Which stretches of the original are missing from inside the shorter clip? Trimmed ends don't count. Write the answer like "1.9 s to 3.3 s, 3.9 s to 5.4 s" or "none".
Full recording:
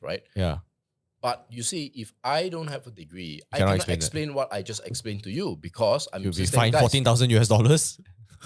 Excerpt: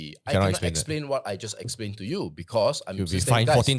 none